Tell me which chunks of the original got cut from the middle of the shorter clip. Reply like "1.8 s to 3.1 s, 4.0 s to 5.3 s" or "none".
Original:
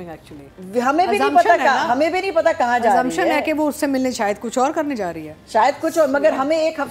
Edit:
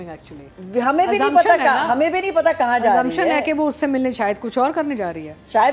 none